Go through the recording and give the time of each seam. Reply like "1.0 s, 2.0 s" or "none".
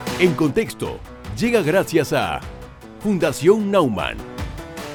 none